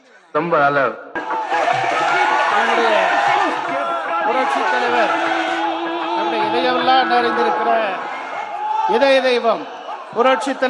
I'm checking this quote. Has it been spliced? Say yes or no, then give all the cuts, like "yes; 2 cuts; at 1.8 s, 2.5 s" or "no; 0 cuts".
yes; 1 cut; at 1.2 s